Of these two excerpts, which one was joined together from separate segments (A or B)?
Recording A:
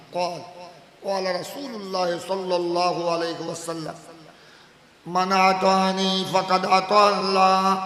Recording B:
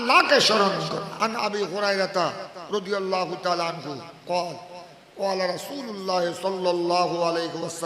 B